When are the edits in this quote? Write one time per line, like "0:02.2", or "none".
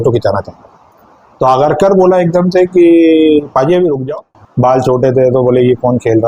0:04.4